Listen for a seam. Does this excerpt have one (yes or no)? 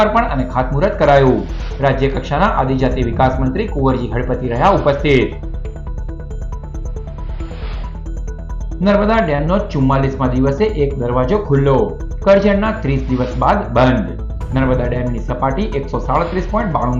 no